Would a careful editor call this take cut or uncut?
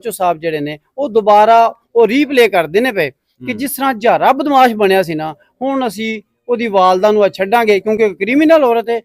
uncut